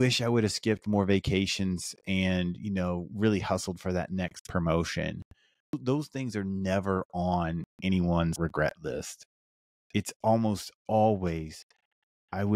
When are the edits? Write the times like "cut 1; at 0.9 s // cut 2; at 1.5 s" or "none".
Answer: cut 1; at 5.8 s // cut 2; at 8.3 s